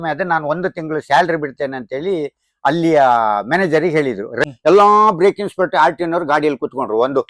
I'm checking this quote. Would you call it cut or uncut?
cut